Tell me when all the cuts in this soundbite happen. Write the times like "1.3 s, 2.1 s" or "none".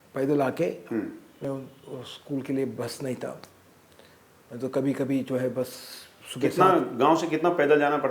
1.4 s